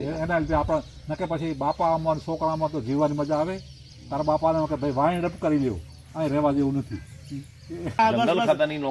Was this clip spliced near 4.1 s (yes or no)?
no